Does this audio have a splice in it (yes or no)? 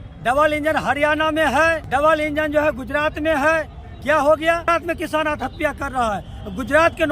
yes